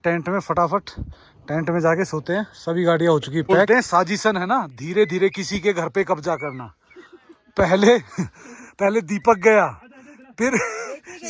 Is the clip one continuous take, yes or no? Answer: no